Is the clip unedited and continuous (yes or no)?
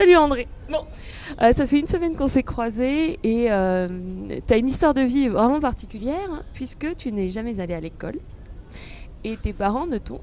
no